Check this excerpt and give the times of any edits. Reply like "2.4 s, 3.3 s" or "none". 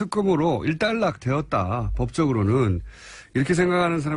2.9 s